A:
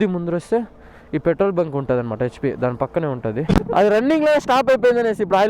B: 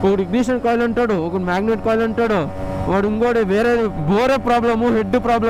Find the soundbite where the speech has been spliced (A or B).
A